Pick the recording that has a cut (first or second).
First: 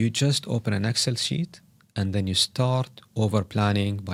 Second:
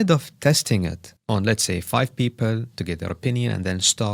second